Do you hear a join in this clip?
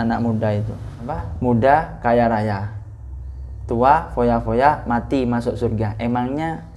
yes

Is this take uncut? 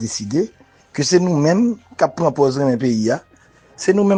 yes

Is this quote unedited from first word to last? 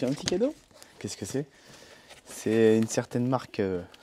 yes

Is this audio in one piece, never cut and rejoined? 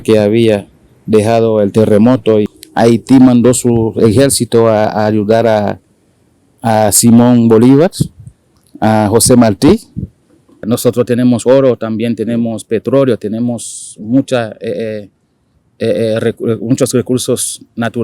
no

